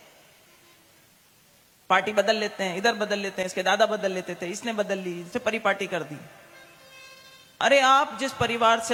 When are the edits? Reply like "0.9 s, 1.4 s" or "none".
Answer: none

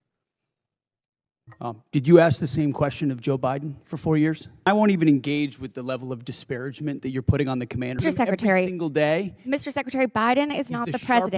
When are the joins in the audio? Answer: 4.7 s, 8.0 s

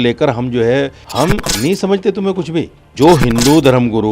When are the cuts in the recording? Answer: 1.0 s, 2.8 s

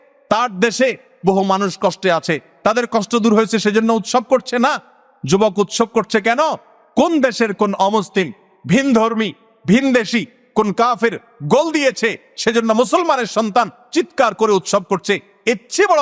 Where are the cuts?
none

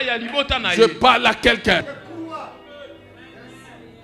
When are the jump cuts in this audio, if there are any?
1.9 s

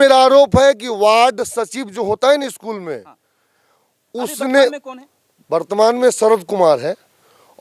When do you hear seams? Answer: none

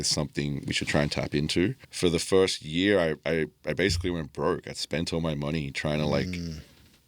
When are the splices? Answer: 1.9 s

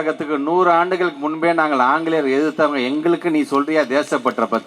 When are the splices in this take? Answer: none

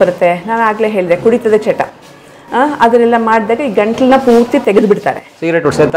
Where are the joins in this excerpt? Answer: none

